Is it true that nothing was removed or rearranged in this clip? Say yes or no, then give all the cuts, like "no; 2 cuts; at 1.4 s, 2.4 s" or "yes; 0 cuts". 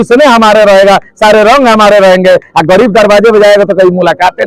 yes; 0 cuts